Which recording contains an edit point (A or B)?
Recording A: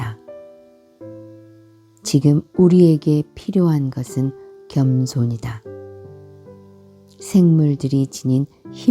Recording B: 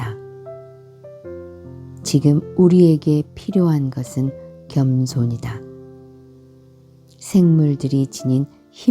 B